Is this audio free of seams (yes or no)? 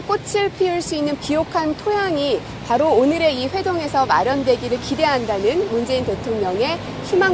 no